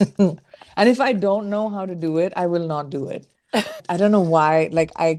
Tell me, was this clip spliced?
no; 0 cuts

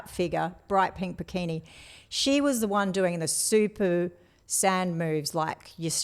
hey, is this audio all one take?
yes; 0 cuts

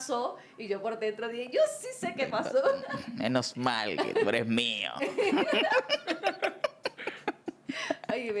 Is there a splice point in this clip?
no; 0 cuts

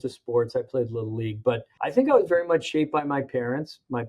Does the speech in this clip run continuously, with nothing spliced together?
no; 1 cut; at 1.7 s

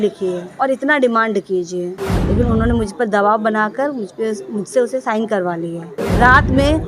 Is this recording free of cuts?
no; 2 cuts; at 2.0 s, 6.0 s

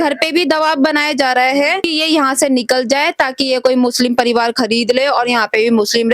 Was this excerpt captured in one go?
no; 1 cut; at 1.9 s

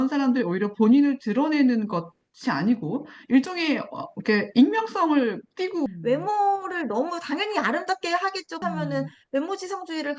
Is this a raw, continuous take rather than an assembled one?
no; 1 cut; at 5.8 s

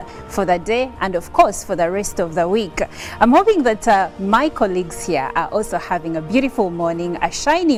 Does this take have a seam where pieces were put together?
no; 0 cuts

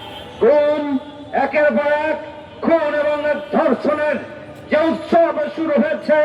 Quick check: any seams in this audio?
no; 0 cuts

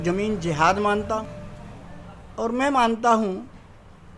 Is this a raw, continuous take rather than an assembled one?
no; 1 cut; at 1.2 s

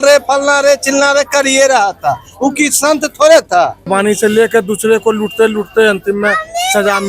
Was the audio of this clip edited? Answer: yes; 1 cut; at 3.9 s

